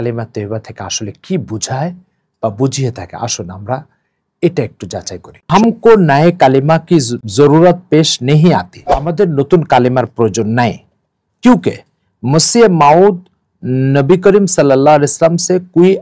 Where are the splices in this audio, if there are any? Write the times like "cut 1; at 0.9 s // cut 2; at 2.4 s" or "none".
cut 1; at 5.5 s // cut 2; at 7.2 s // cut 3; at 9.1 s